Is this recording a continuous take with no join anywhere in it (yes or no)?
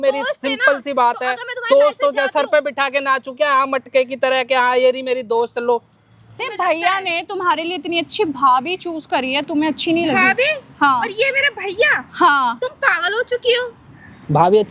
no